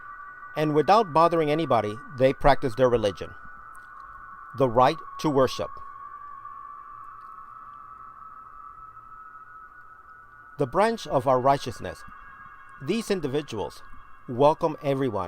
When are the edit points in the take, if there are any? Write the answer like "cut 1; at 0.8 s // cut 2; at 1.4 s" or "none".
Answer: cut 1; at 4.8 s